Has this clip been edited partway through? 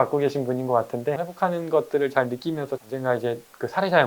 yes; 2 cuts; at 1.3 s, 2.8 s

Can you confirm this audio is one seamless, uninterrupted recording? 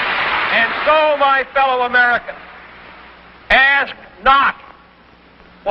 yes; 0 cuts

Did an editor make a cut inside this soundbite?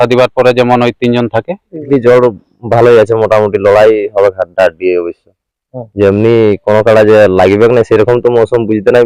yes; 1 cut; at 1.9 s

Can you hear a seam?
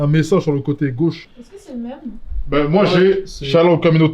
yes; 1 cut; at 1.2 s

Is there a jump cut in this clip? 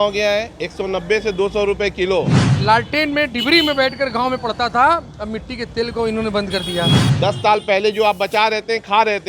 yes; 2 cuts; at 2.4 s, 7.0 s

